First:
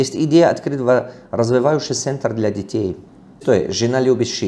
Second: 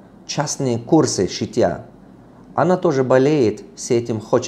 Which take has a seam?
first; 1 cut; at 3.1 s

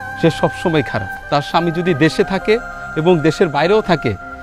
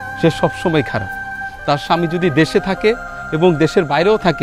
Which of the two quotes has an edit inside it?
first; 1 cut; at 1.1 s

